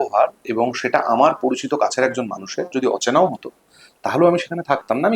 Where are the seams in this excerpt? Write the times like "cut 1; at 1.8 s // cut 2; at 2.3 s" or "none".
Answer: none